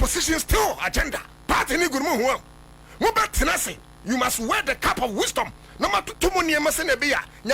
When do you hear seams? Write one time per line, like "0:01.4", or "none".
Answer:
0:01.3